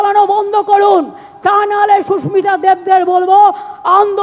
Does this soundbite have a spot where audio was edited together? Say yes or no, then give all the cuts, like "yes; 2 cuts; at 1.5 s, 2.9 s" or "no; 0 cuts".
no; 0 cuts